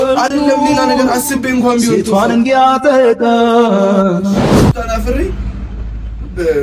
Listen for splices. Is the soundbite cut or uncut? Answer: cut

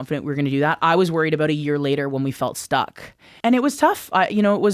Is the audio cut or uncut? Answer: cut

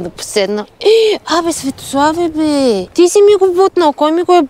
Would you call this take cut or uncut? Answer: cut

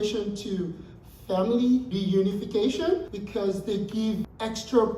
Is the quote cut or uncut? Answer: cut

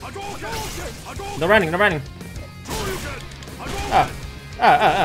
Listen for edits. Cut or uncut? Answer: cut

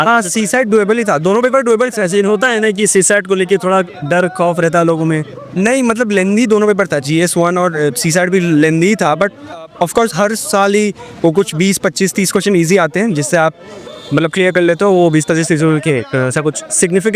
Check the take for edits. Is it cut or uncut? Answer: uncut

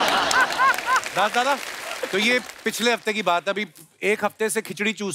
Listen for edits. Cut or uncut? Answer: uncut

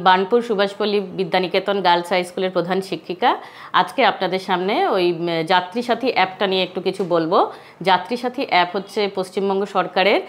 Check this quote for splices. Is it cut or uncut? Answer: uncut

